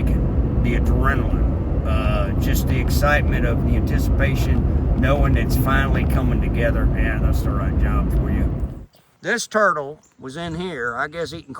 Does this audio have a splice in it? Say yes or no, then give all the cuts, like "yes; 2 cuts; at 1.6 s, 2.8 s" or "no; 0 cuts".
yes; 1 cut; at 8.7 s